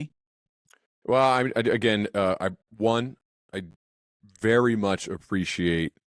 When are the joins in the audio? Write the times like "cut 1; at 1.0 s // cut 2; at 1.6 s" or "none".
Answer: none